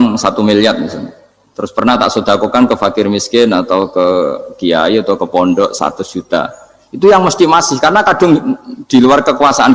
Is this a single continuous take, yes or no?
yes